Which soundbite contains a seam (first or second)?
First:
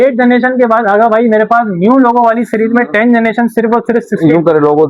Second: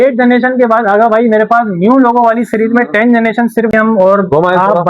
second